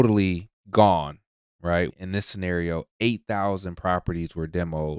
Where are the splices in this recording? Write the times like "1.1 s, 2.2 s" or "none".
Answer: 1.9 s